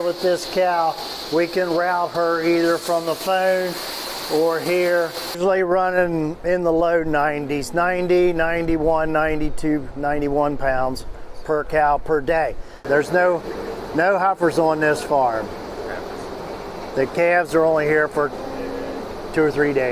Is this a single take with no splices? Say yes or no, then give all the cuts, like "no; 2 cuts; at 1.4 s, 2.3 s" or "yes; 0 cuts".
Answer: no; 2 cuts; at 5.4 s, 12.7 s